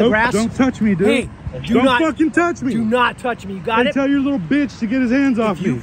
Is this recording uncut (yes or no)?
yes